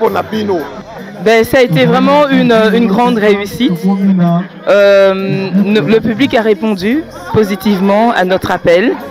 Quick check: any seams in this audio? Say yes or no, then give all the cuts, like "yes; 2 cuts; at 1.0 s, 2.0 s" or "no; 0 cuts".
yes; 1 cut; at 0.9 s